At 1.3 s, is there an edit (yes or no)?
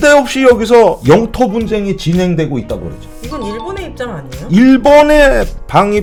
no